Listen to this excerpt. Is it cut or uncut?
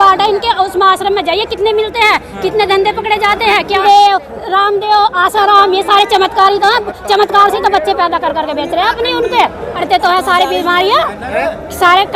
cut